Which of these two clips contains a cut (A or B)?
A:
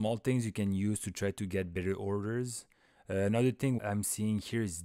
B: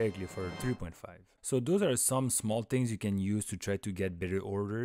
A